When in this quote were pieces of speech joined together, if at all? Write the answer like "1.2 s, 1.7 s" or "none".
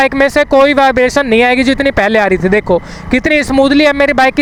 none